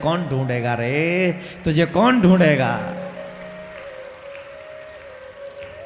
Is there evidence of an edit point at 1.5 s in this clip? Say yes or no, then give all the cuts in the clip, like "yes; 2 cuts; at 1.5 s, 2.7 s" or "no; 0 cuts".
no; 0 cuts